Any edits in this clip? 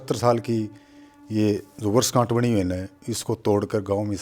no; 0 cuts

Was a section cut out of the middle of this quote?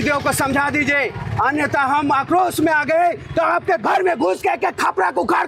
no; 0 cuts

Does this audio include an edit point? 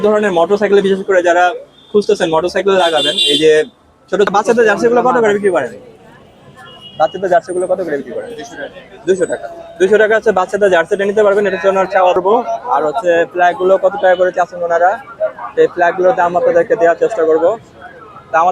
yes; 2 cuts; at 4.3 s, 12.2 s

